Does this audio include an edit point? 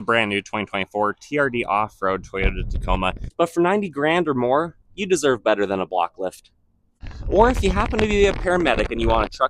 yes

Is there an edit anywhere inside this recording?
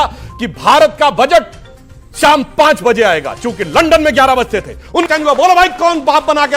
yes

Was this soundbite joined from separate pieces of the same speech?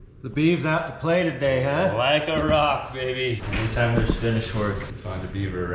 yes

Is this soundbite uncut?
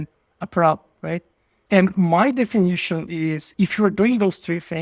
yes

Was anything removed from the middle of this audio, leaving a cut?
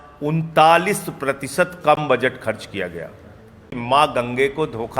yes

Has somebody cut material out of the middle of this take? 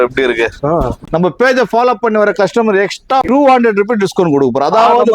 yes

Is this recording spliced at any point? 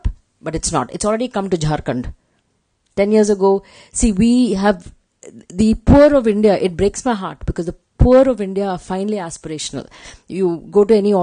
no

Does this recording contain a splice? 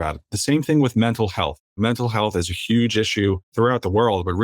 yes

